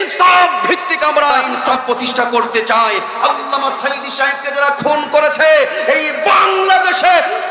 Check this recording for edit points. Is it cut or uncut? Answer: cut